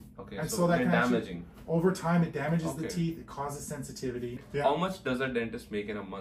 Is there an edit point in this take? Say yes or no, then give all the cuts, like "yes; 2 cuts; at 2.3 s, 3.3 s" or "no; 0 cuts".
yes; 1 cut; at 4.6 s